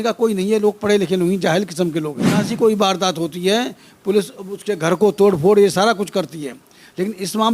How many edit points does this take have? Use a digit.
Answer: 1